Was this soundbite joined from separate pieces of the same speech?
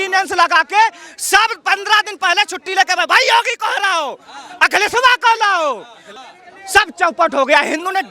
yes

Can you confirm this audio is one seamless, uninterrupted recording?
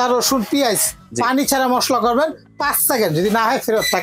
yes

